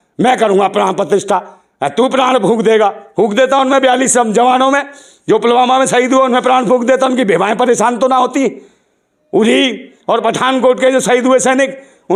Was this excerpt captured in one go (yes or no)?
yes